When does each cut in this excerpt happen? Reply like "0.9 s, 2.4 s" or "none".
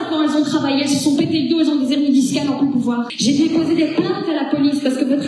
3.1 s